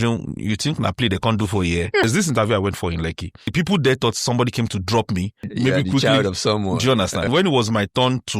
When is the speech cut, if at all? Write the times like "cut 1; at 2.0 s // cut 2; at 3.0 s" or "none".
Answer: cut 1; at 2.0 s // cut 2; at 3.5 s // cut 3; at 5.4 s // cut 4; at 7.3 s

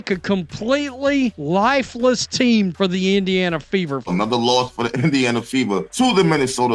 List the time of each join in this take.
cut 1; at 1.4 s // cut 2; at 2.7 s // cut 3; at 4.0 s // cut 4; at 5.9 s

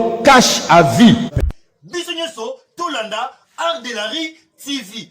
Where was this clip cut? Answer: cut 1; at 1.4 s

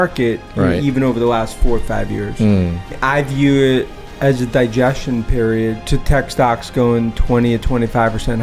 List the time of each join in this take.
cut 1; at 3.0 s // cut 2; at 5.8 s

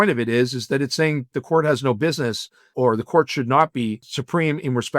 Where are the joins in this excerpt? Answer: cut 1; at 2.7 s // cut 2; at 4.1 s

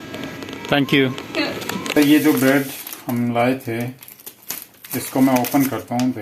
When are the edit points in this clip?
cut 1; at 1.9 s

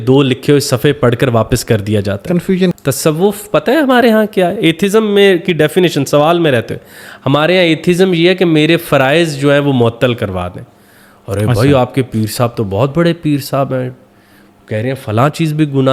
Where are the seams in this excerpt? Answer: cut 1; at 2.8 s

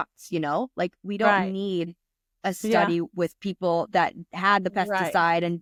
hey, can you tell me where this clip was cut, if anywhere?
none

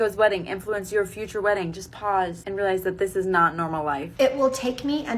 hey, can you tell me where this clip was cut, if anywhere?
cut 1; at 2.4 s // cut 2; at 4.1 s

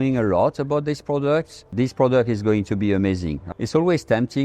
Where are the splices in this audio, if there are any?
cut 1; at 1.6 s // cut 2; at 3.4 s

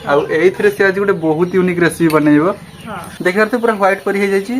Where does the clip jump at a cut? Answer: cut 1; at 3.0 s

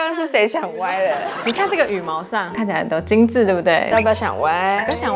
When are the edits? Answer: none

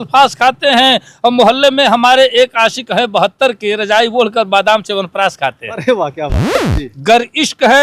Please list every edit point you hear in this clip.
cut 1; at 6.6 s

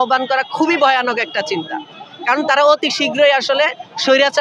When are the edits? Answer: none

